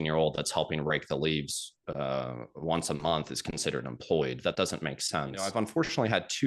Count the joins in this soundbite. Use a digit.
1